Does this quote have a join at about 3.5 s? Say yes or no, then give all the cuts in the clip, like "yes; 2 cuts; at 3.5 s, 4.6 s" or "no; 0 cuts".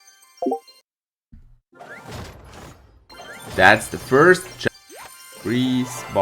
yes; 2 cuts; at 3.5 s, 4.5 s